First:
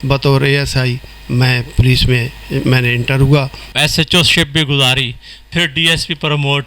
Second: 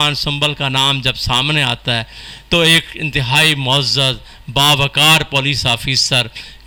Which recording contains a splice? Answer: first; 1 cut; at 3.6 s

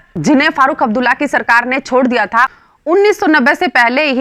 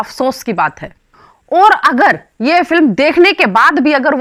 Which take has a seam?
first; 1 cut; at 2.5 s

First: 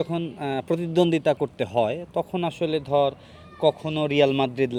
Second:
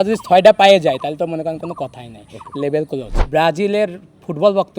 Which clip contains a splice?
second; 1 cut; at 3.2 s

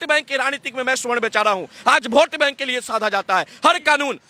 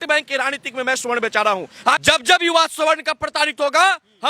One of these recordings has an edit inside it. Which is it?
second; 1 cut; at 2.0 s

